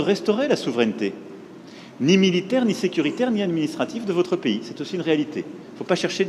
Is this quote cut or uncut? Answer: uncut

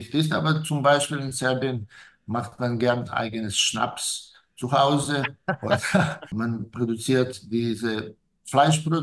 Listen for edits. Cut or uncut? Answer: cut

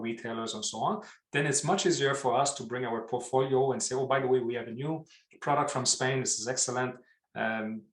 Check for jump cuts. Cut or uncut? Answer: uncut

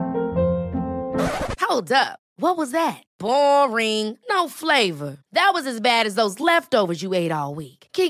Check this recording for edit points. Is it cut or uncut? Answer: uncut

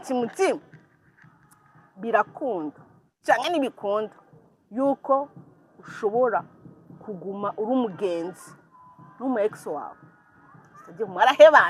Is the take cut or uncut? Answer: uncut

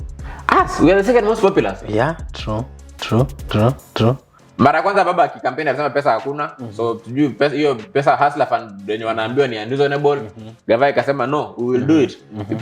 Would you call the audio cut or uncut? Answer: cut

